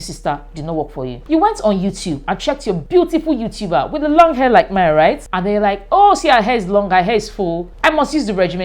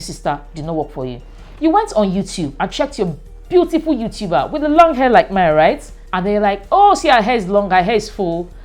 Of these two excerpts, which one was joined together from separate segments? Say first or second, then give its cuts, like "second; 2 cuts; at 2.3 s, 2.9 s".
first; 4 cuts; at 1.2 s, 2.8 s, 5.3 s, 7.7 s